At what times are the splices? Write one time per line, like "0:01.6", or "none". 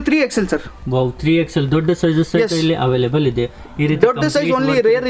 none